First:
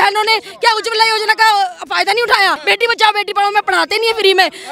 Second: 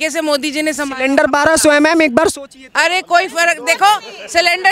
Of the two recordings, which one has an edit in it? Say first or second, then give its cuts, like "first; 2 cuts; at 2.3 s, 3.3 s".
first; 1 cut; at 2.6 s